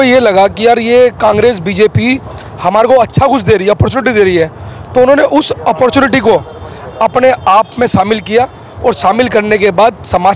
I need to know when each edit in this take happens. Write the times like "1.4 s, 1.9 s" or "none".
none